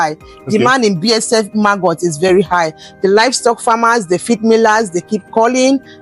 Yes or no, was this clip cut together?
no